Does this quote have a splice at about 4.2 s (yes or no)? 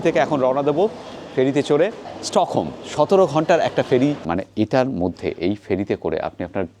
yes